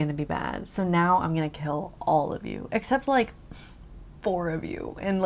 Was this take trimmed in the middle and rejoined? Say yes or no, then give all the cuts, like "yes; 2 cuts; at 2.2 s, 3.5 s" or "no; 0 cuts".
no; 0 cuts